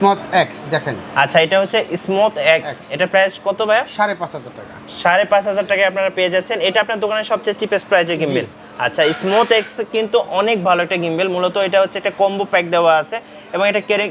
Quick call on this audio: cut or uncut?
uncut